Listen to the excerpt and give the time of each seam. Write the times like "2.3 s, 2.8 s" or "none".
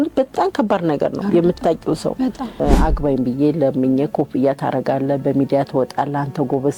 2.5 s